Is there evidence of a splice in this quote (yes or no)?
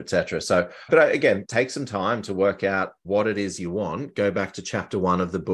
yes